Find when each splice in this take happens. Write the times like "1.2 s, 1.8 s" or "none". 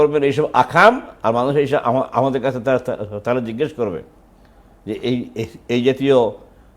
none